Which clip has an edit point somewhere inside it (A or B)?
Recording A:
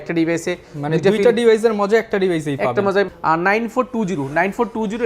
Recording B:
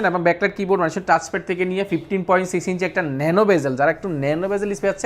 A